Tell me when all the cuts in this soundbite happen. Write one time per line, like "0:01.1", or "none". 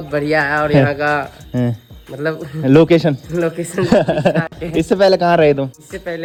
none

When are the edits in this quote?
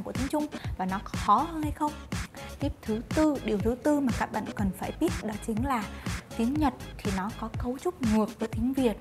0:02.4

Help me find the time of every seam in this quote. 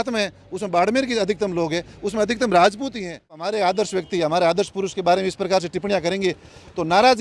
0:03.4

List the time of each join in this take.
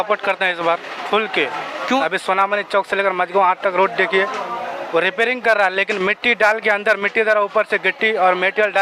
0:02.0

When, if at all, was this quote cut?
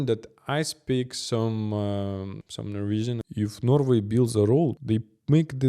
0:02.4
0:03.2
0:04.8

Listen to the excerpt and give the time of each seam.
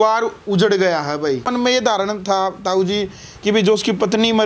0:01.5

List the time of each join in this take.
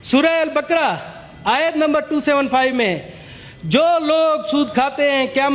none

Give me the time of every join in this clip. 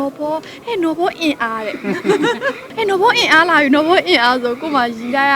0:02.7

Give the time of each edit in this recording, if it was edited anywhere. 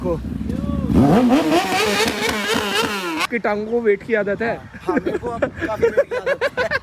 0:03.3

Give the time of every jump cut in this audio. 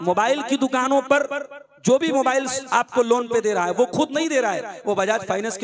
none

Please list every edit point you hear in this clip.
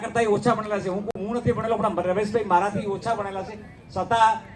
none

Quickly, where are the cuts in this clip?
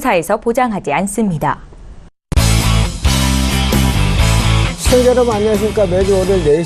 0:01.6

